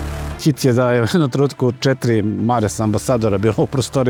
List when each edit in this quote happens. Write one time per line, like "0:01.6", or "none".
none